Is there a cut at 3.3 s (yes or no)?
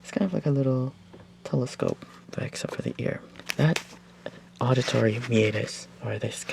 yes